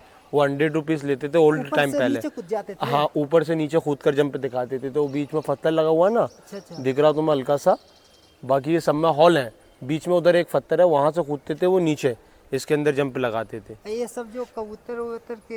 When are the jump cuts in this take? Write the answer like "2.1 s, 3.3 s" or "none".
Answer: none